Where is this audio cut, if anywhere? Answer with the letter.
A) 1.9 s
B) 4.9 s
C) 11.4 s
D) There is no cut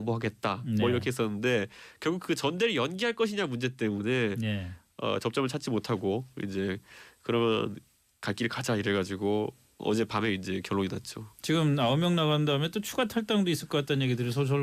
D